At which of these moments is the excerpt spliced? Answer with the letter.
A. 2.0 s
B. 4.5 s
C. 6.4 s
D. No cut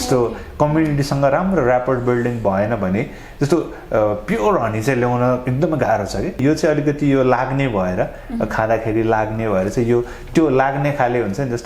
C